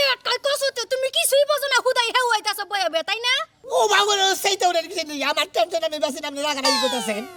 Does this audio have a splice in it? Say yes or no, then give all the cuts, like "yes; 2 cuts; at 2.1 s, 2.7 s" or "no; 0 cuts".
no; 0 cuts